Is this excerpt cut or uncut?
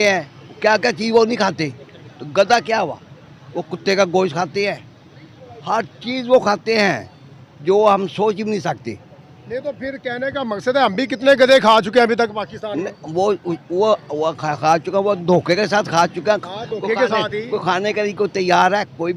uncut